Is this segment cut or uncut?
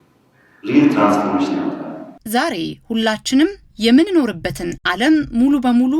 cut